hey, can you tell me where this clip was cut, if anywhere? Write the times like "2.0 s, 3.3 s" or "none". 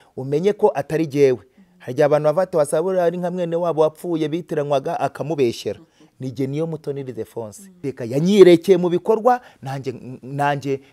7.6 s